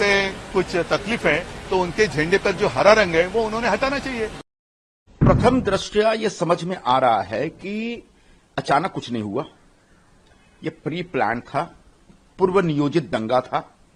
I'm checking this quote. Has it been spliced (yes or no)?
no